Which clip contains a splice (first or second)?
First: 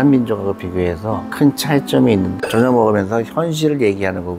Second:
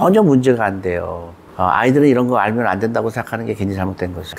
first